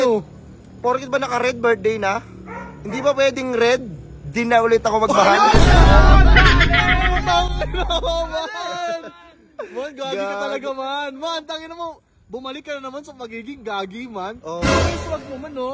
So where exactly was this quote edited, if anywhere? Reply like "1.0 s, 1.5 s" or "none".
none